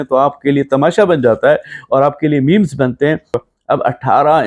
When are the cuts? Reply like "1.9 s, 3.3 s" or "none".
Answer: 3.4 s